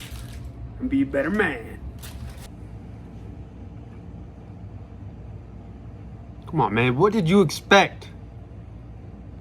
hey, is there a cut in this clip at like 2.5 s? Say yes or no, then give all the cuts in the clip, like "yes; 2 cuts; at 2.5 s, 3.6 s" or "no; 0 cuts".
yes; 1 cut; at 2.5 s